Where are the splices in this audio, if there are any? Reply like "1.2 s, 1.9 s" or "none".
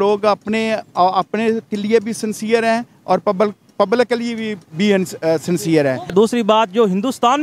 6.1 s